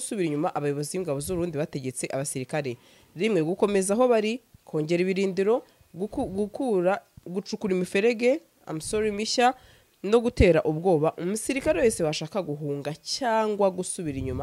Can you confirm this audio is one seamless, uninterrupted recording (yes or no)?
yes